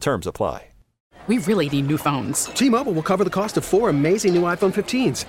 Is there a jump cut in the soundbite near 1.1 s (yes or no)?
yes